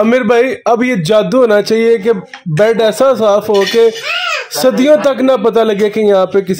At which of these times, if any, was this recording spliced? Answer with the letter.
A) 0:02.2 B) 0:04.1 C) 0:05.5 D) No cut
D